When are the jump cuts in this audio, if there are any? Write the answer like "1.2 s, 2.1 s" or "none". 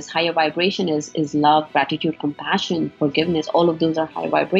none